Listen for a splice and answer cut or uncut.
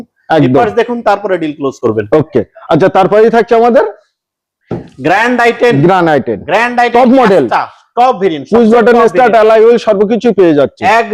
uncut